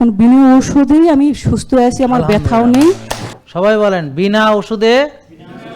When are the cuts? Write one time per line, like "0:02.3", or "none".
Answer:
0:03.4